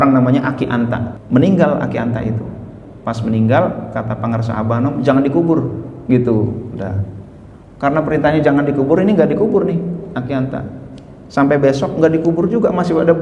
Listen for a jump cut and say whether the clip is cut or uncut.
cut